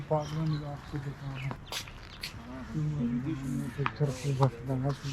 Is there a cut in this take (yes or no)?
yes